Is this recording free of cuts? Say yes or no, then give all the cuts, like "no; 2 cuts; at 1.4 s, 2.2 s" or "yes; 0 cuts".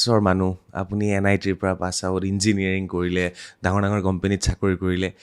yes; 0 cuts